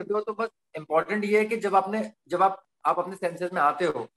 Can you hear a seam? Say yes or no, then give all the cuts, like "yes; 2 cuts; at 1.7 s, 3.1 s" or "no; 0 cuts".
no; 0 cuts